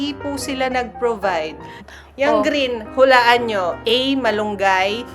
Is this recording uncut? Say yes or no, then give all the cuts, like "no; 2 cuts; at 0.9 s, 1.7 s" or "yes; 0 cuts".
no; 1 cut; at 1.8 s